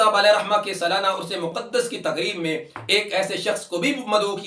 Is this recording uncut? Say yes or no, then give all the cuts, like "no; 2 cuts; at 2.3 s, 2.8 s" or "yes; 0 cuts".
yes; 0 cuts